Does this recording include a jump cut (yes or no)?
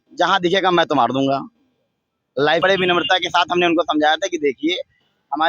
yes